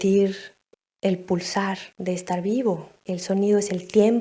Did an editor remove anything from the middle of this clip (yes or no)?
yes